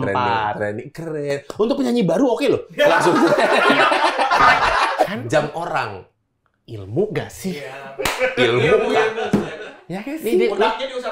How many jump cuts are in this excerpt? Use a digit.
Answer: 1